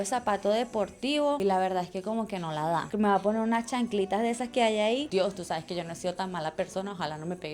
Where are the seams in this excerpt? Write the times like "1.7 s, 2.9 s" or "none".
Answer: 2.9 s, 5.1 s